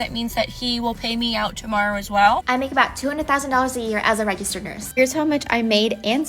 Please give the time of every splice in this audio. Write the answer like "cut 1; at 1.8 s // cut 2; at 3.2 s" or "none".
cut 1; at 2.4 s // cut 2; at 4.8 s